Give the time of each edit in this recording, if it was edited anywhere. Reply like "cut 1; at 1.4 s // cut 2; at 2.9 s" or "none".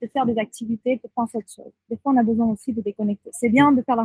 none